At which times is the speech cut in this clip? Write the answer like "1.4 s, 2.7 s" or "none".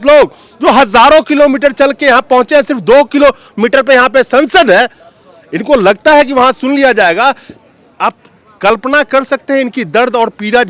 none